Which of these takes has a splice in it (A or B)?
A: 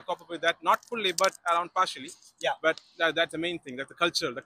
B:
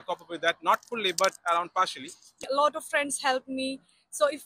B